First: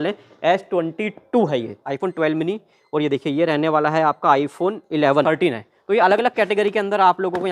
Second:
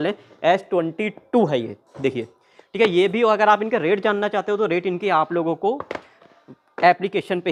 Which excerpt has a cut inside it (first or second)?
first